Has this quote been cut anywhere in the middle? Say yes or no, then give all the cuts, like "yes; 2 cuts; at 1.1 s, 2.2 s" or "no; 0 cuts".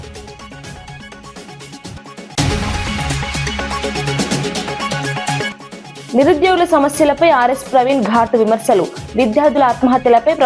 no; 0 cuts